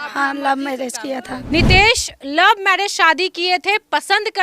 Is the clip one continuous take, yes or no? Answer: no